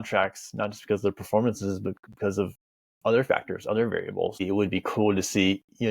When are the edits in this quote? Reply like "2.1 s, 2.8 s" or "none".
4.4 s